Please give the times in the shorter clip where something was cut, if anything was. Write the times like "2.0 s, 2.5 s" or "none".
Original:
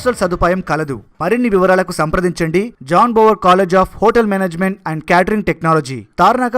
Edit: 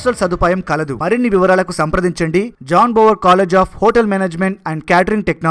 0.9 s